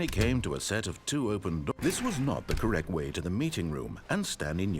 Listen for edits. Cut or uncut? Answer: cut